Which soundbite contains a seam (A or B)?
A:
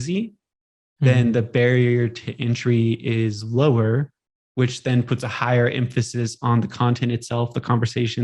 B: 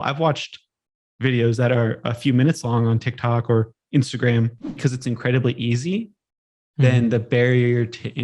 B